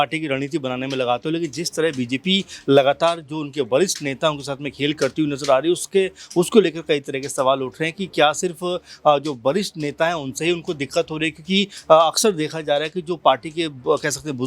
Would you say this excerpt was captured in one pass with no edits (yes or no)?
yes